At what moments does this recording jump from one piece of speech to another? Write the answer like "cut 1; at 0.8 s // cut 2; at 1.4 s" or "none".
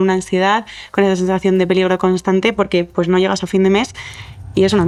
none